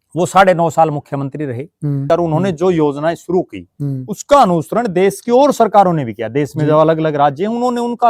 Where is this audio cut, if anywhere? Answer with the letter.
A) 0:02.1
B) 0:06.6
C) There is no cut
A